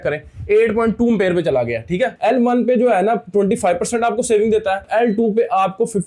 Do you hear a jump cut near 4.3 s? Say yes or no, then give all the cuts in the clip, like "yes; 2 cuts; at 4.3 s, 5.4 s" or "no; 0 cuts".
no; 1 cut; at 2.2 s